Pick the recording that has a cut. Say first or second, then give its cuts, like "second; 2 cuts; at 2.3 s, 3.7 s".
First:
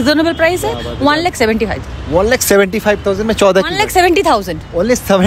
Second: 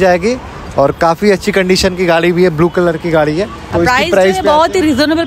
second; 1 cut; at 3.6 s